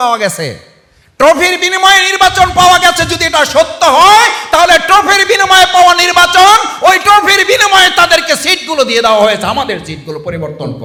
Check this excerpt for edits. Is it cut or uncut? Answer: uncut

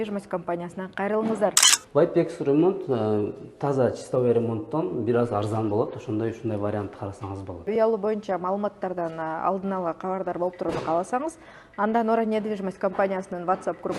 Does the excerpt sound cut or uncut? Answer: cut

